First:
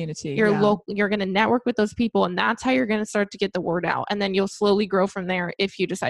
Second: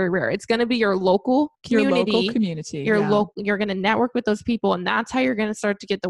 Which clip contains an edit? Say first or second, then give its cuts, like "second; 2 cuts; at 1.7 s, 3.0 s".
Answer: second; 1 cut; at 1.6 s